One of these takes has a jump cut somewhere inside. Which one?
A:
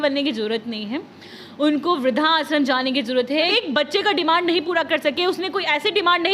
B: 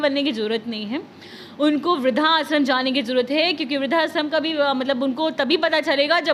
A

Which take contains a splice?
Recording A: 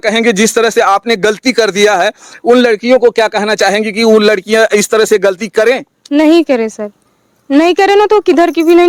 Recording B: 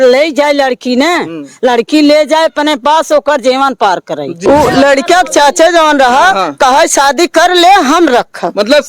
B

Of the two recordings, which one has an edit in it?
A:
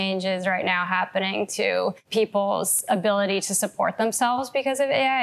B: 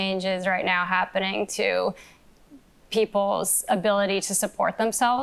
A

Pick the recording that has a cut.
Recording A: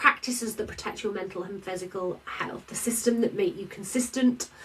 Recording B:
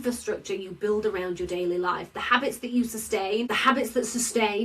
B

